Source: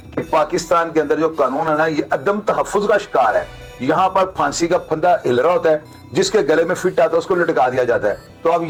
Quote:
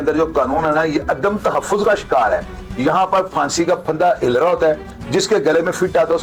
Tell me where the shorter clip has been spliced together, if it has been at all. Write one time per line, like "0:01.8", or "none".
none